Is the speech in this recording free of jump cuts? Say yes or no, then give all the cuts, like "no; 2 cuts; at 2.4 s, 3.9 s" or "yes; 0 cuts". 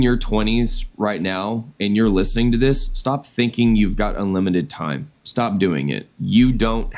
yes; 0 cuts